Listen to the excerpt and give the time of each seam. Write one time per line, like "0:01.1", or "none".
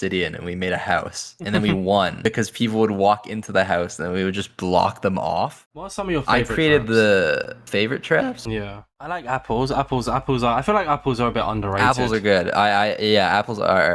0:05.8
0:08.9